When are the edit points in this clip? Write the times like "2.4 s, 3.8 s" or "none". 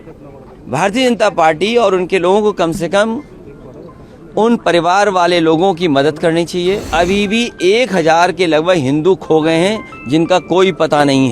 6.9 s